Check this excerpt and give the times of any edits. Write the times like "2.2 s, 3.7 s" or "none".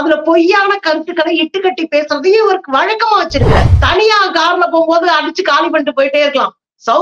3.8 s

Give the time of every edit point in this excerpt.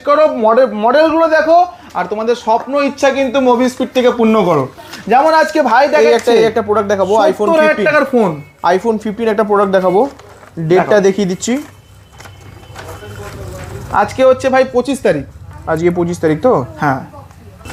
none

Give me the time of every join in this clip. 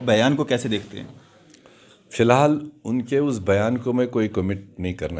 none

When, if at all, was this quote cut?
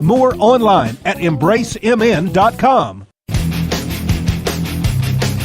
3.1 s

